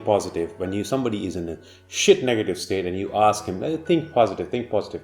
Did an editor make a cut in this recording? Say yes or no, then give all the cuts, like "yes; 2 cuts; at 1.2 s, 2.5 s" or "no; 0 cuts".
no; 0 cuts